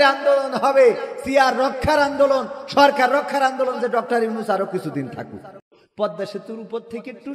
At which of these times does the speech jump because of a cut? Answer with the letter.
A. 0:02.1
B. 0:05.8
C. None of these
B